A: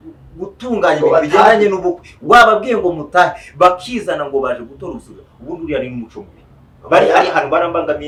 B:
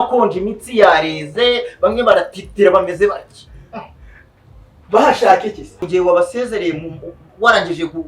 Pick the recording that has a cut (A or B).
B